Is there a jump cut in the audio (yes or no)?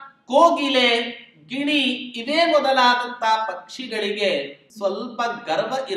yes